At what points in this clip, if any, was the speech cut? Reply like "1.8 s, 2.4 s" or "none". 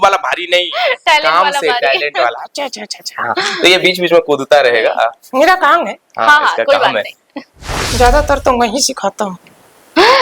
7.8 s